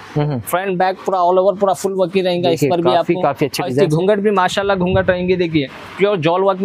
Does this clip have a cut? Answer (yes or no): no